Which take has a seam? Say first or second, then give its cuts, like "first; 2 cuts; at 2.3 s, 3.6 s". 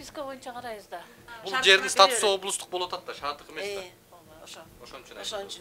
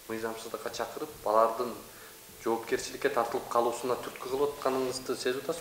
first; 1 cut; at 1.3 s